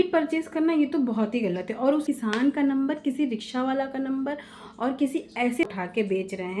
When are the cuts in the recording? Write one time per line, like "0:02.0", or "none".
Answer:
0:02.1
0:05.7